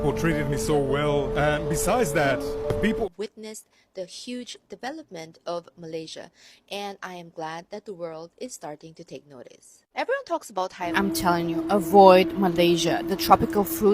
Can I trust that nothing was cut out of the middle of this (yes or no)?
no